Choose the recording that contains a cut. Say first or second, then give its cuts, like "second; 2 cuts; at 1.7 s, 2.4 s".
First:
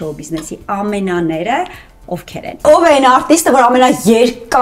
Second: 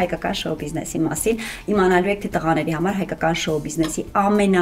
first; 1 cut; at 2.6 s